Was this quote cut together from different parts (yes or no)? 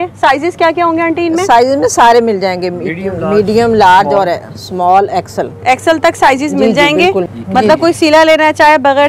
yes